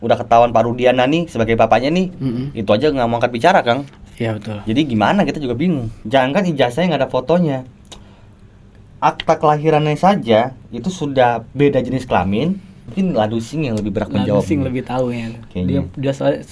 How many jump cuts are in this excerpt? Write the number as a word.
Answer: two